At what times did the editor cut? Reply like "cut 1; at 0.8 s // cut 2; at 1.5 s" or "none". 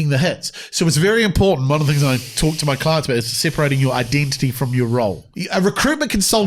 cut 1; at 5.3 s